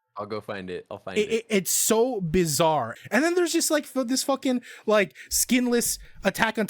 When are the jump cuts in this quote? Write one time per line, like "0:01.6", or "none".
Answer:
0:02.9